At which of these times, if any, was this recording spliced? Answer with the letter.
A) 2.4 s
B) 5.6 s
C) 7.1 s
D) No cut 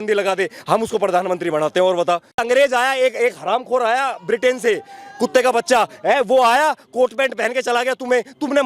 A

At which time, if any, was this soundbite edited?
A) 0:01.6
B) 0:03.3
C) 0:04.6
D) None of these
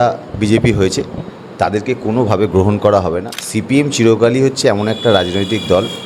B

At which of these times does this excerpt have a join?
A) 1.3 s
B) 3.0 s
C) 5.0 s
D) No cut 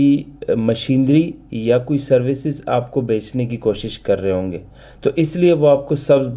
D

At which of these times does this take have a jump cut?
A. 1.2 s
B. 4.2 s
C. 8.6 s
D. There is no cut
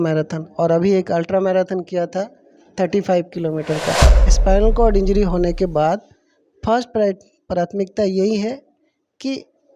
B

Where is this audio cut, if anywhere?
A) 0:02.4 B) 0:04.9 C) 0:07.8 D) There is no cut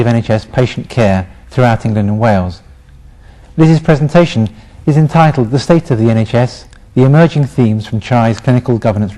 C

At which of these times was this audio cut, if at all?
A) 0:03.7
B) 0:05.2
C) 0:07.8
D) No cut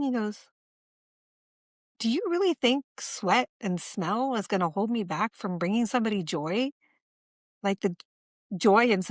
D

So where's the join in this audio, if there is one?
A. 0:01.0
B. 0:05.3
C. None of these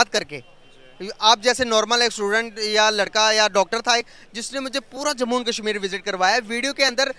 C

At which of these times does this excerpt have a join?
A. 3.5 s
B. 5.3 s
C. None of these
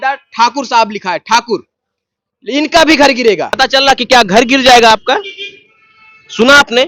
A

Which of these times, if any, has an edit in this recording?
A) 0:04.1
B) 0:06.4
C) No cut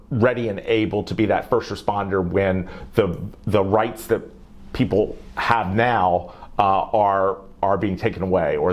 C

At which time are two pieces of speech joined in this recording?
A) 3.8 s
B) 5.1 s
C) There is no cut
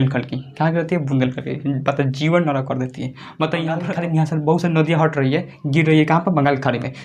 A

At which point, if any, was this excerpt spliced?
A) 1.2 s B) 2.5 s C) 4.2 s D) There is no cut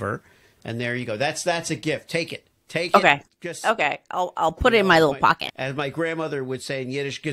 D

